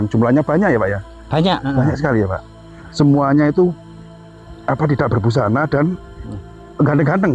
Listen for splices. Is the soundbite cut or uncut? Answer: uncut